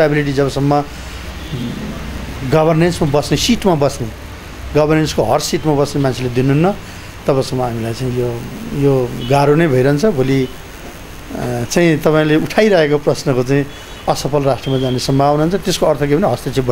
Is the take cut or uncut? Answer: uncut